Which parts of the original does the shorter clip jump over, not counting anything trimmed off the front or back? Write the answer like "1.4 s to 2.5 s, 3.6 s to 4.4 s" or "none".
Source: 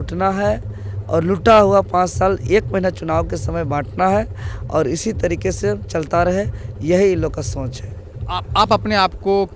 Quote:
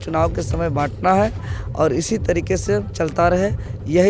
none